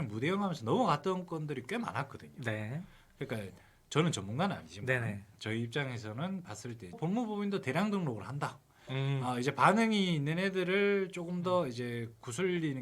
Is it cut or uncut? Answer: cut